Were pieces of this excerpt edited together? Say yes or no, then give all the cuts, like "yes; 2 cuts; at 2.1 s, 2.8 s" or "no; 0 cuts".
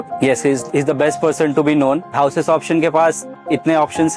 yes; 1 cut; at 2.1 s